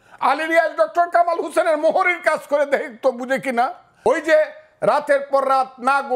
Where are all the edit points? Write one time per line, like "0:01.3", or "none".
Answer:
0:03.9